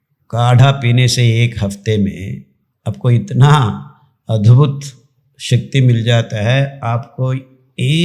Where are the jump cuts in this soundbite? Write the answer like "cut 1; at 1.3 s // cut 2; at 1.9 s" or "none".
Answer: none